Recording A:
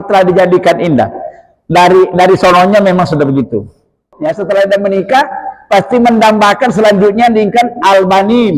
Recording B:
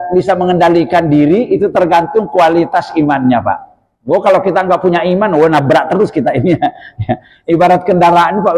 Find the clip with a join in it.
A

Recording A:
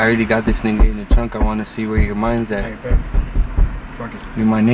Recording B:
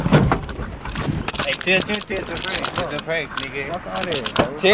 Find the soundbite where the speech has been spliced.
B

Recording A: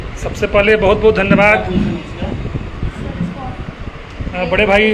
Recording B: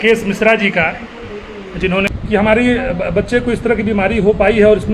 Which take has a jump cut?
B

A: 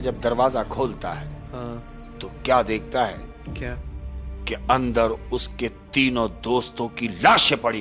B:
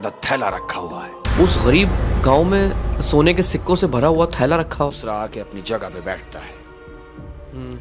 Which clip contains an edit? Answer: B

